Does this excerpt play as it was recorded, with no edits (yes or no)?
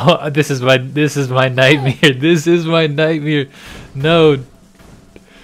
yes